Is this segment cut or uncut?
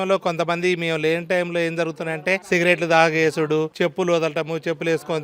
cut